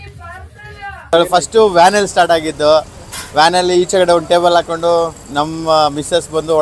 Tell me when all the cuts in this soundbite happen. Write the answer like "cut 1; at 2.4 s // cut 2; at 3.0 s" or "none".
cut 1; at 1.1 s